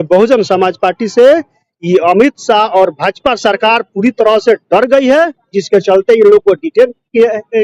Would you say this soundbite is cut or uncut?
uncut